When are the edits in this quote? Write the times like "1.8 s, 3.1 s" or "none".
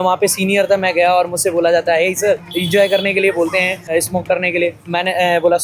2.5 s, 3.9 s, 4.8 s

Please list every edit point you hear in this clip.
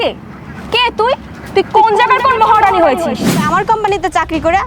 3.4 s

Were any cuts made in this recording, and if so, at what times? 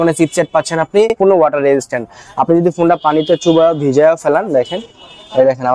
1.2 s

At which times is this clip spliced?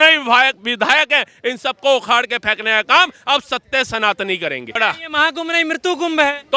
4.7 s

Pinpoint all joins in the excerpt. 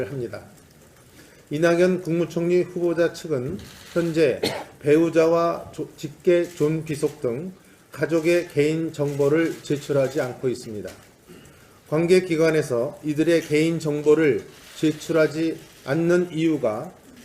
4.9 s

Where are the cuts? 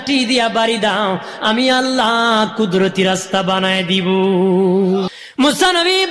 5.1 s

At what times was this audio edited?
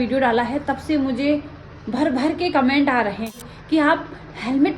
3.4 s

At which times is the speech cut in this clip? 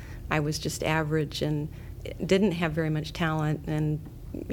none

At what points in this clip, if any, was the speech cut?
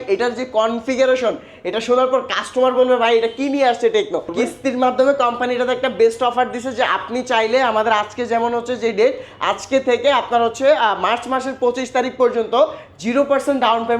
4.3 s

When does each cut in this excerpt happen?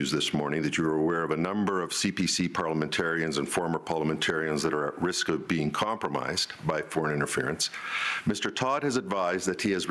none

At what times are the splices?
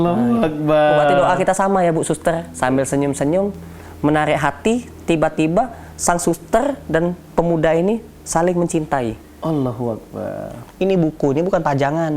10.6 s

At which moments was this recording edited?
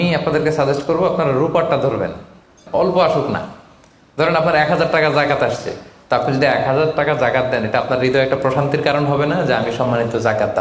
2.6 s

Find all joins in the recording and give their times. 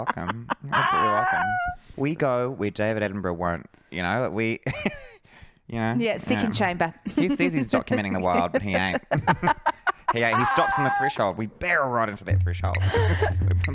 1.9 s

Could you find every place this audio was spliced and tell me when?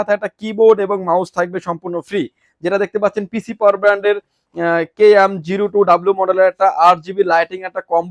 none

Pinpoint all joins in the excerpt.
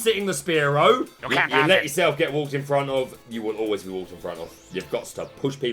1.2 s, 4.5 s

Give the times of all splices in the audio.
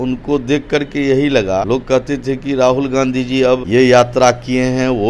1.7 s, 3.6 s

